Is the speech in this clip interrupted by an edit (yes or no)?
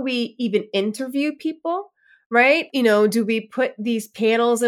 yes